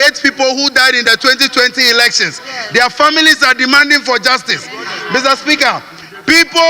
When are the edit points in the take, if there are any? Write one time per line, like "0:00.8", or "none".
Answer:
none